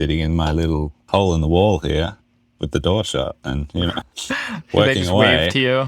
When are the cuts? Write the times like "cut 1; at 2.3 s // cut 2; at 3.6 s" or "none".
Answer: none